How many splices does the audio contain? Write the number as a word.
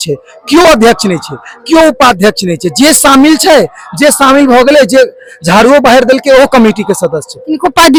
zero